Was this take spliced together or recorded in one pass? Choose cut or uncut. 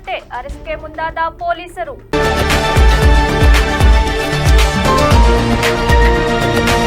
cut